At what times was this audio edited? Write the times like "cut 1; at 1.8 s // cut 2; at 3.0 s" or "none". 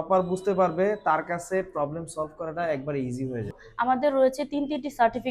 cut 1; at 3.6 s